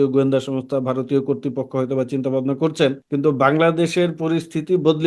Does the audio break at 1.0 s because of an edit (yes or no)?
no